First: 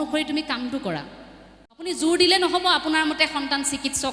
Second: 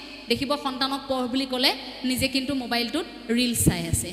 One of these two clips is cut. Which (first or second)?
first